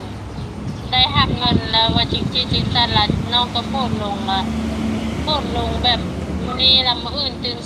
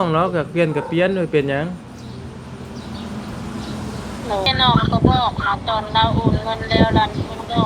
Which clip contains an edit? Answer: second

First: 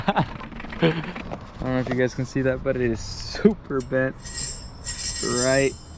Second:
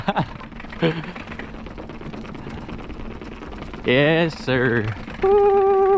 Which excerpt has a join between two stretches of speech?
first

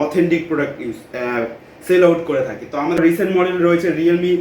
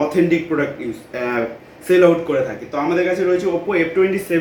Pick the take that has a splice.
first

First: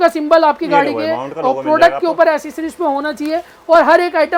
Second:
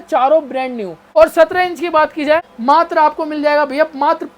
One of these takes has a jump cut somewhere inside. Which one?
second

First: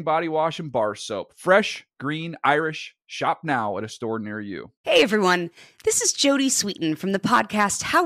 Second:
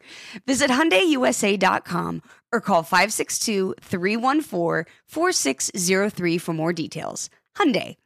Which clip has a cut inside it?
first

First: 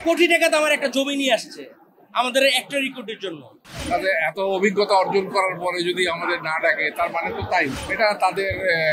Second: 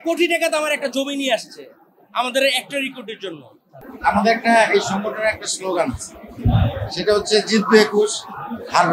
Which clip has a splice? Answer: first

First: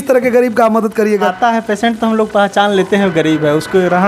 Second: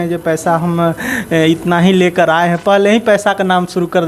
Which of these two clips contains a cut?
first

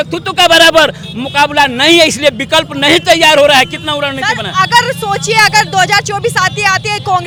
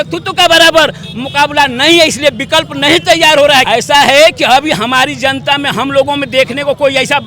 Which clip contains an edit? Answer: second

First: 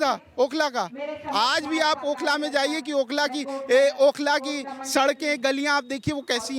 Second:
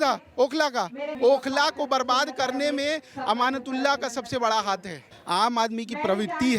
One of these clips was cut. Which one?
second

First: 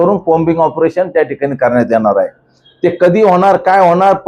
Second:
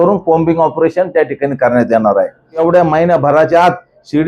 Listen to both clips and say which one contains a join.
second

